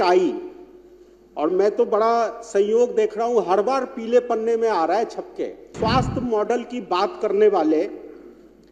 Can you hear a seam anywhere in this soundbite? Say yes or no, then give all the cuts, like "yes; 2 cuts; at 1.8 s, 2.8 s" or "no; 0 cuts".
yes; 1 cut; at 5.7 s